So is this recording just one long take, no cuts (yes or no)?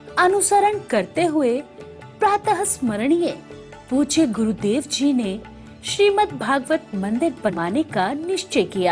no